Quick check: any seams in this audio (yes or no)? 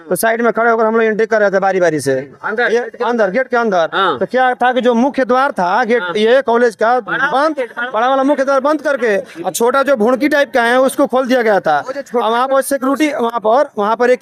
no